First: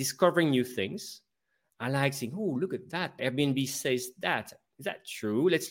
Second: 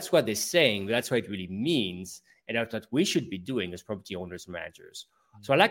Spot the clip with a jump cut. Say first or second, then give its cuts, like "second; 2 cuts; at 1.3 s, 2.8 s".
first; 1 cut; at 3.2 s